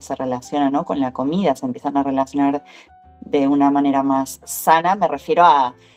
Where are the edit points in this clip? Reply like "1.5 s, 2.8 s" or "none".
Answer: none